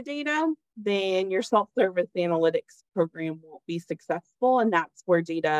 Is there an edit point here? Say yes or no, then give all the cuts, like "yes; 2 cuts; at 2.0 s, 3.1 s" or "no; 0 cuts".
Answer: no; 0 cuts